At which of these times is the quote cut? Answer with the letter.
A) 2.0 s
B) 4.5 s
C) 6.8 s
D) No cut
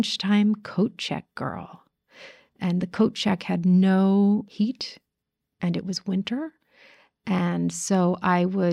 B